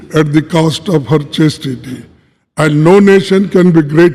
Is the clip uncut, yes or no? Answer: yes